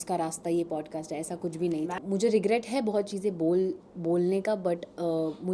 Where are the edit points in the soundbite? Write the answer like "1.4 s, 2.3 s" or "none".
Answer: 2.0 s